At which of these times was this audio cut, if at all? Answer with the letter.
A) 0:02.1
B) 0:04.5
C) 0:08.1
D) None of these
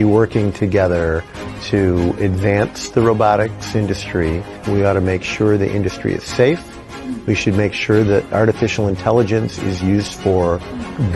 B